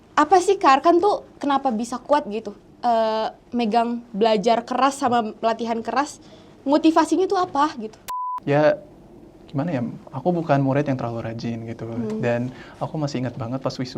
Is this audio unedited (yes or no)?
no